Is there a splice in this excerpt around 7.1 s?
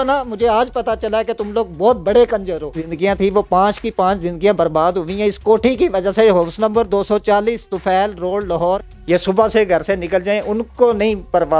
no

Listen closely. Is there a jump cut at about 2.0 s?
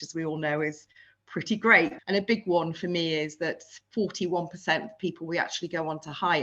yes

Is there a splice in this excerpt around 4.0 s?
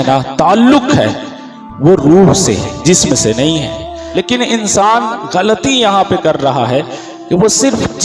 yes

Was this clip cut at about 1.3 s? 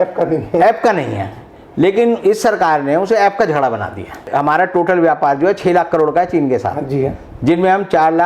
no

